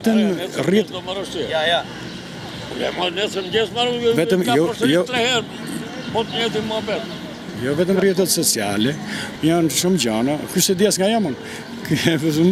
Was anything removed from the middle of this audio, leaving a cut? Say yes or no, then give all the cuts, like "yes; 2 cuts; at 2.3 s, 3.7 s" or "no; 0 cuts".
no; 0 cuts